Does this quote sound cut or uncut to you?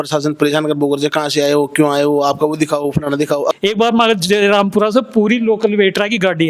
cut